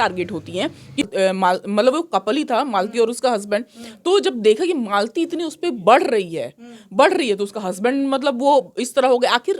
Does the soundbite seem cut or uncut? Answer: cut